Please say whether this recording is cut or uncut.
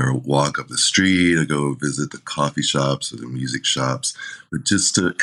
uncut